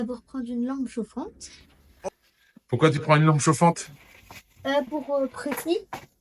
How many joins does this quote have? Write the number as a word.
one